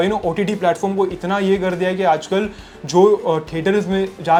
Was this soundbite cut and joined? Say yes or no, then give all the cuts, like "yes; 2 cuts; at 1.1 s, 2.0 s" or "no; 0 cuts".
no; 0 cuts